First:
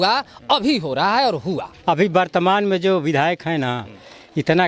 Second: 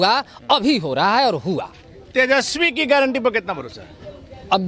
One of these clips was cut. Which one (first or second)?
first